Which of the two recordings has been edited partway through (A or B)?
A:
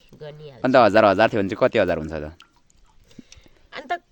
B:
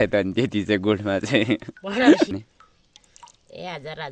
B